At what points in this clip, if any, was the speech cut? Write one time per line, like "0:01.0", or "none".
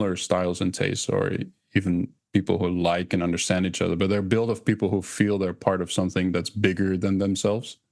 none